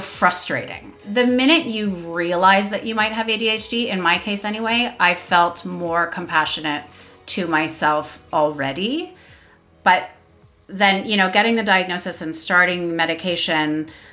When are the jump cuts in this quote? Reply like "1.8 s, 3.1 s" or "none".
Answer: 1.1 s